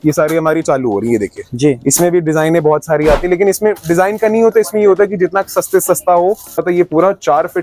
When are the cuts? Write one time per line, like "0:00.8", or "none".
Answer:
0:06.6